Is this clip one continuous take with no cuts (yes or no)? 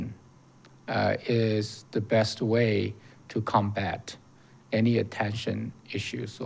yes